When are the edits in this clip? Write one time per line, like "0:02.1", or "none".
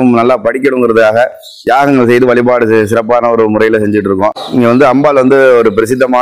0:04.4